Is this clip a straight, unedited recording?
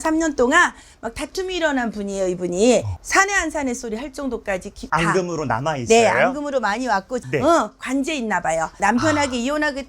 no; 3 cuts; at 2.9 s, 7.2 s, 8.8 s

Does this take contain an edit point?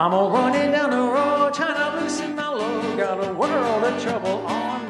no; 0 cuts

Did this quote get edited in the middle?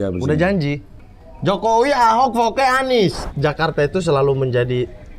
yes; 1 cut; at 3.2 s

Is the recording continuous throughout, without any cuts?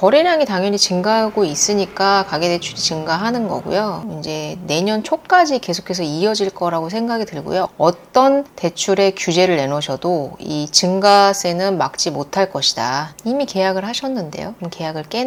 yes; 0 cuts

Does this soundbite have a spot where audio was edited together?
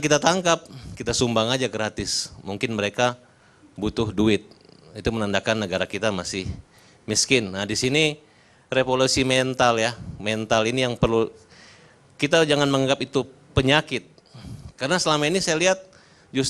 yes; 1 cut; at 3.4 s

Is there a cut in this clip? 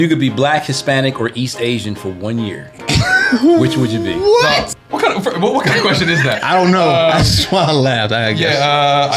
yes; 1 cut; at 4.7 s

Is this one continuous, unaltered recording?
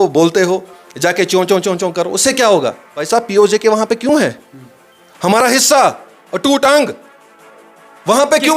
no; 1 cut; at 2.9 s

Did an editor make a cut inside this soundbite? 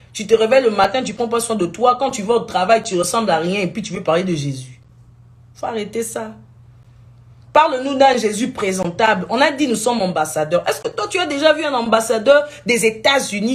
no; 0 cuts

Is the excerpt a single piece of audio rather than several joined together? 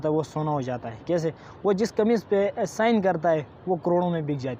yes; 0 cuts

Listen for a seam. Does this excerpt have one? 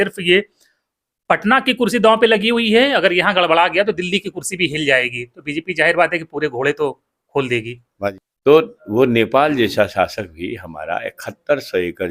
yes; 1 cut; at 8.1 s

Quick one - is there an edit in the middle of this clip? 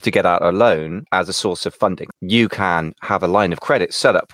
yes; 2 cuts; at 1.0 s, 2.0 s

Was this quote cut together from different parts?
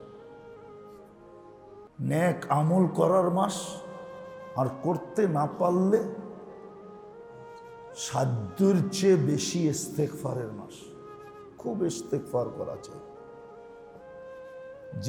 no; 0 cuts

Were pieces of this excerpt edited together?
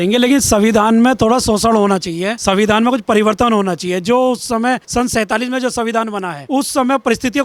no; 0 cuts

